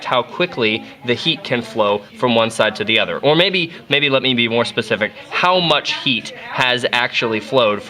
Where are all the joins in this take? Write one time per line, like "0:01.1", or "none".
0:03.1